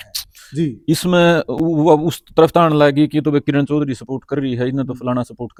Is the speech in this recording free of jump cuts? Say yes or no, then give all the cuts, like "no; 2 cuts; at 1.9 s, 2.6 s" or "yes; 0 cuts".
yes; 0 cuts